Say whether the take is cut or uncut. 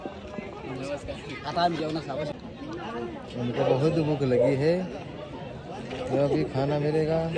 cut